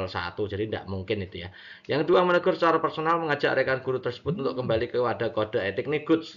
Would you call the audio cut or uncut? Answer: cut